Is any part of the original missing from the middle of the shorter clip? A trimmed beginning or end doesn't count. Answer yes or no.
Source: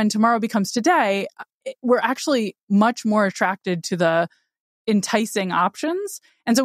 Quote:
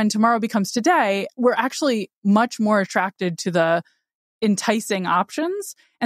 yes